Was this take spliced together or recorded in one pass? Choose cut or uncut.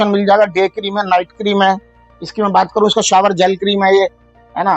uncut